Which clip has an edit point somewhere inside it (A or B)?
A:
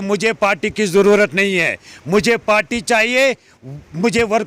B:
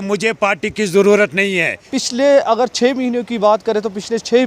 B